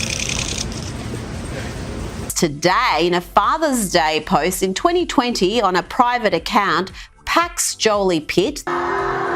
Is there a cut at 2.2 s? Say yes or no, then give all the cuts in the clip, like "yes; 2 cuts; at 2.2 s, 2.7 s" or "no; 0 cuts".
no; 0 cuts